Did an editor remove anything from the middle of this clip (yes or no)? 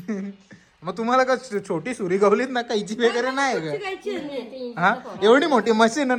no